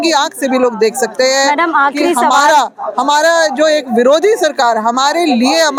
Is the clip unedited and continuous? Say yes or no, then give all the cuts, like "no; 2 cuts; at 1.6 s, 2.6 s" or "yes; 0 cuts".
yes; 0 cuts